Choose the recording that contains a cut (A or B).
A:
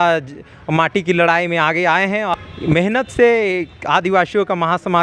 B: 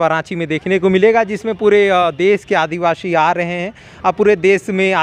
A